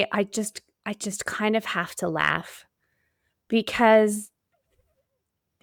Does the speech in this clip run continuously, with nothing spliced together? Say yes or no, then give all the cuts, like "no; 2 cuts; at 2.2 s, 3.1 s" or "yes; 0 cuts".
yes; 0 cuts